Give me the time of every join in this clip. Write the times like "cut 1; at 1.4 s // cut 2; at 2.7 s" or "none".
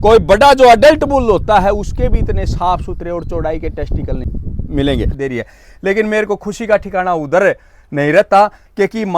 cut 1; at 4.2 s // cut 2; at 5.1 s